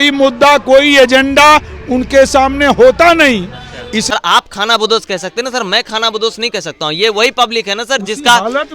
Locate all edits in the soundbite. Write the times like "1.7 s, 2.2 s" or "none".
4.0 s